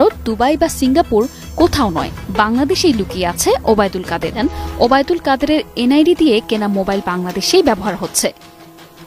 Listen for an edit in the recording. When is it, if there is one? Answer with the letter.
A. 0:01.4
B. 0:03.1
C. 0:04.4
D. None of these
C